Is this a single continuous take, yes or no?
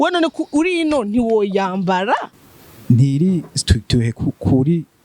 no